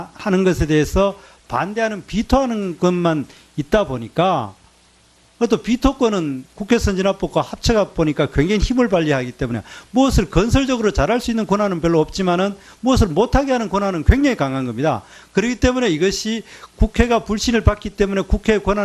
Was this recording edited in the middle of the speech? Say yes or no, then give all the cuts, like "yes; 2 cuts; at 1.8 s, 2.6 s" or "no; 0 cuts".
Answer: no; 0 cuts